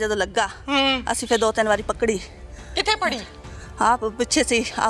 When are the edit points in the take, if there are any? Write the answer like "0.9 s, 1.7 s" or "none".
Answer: none